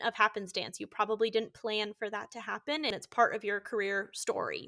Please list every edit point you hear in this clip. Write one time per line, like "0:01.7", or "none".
0:02.9